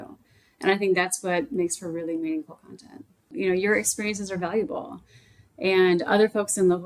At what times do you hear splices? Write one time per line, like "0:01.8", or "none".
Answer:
0:03.1